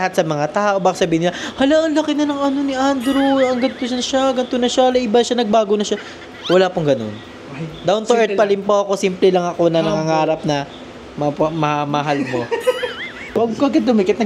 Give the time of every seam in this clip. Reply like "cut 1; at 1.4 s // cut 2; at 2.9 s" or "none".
cut 1; at 13.4 s